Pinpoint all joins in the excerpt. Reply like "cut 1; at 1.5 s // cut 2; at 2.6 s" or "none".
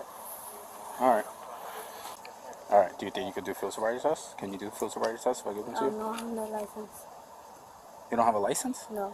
cut 1; at 2.2 s